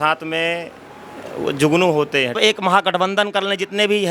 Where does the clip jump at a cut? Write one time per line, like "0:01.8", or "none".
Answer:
0:02.4